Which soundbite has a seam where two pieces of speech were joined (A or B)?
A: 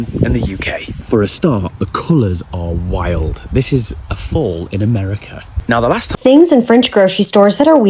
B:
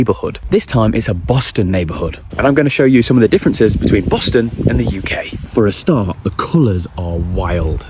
A